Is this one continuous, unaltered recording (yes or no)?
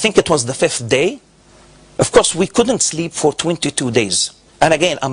yes